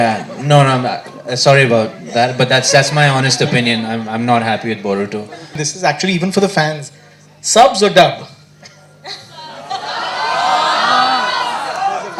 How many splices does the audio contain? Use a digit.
1